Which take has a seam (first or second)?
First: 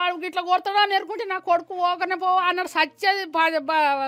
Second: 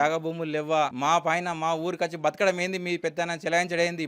second